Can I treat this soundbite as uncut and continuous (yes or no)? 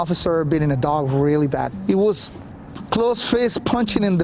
no